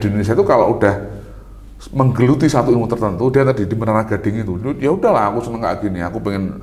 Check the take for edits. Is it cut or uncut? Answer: uncut